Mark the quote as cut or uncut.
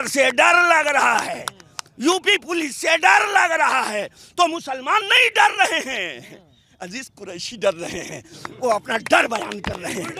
uncut